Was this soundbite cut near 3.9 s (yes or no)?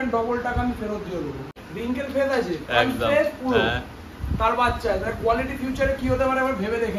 no